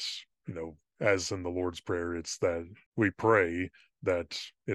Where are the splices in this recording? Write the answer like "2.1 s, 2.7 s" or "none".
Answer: 2.8 s